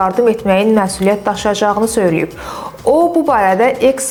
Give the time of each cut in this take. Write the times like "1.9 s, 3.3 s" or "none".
none